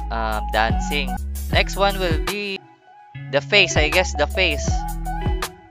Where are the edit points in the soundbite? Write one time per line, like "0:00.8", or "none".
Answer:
0:01.1
0:02.6